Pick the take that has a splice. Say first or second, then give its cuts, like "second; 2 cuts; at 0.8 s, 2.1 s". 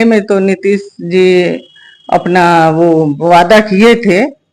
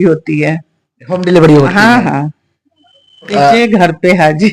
second; 1 cut; at 3.3 s